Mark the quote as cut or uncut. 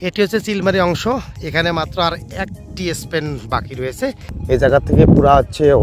cut